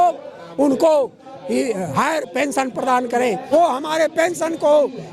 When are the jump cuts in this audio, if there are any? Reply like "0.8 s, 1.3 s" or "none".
3.5 s